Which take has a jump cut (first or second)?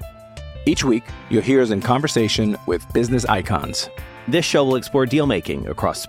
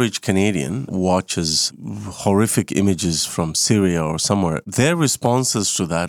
second